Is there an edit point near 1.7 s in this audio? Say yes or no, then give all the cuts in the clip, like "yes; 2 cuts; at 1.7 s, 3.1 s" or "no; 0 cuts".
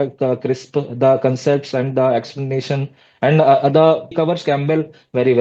no; 1 cut; at 4.1 s